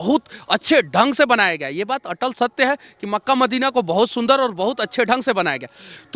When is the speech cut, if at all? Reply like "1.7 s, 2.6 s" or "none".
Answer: none